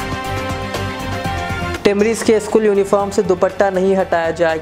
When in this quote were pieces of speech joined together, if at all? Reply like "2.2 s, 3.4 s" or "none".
1.7 s